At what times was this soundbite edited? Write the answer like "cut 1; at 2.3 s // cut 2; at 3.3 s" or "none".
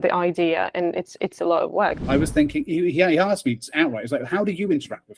cut 1; at 2.0 s